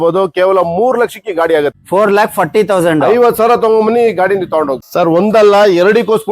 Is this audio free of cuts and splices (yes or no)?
no